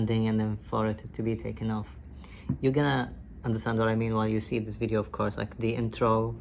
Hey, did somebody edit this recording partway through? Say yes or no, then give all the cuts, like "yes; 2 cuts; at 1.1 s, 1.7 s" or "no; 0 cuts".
no; 0 cuts